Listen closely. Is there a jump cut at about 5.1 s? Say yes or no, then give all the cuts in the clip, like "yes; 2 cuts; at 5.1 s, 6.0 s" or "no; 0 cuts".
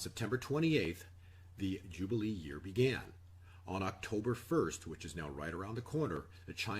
no; 1 cut; at 3.0 s